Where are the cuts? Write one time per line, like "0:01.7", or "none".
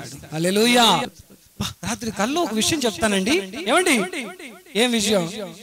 0:01.1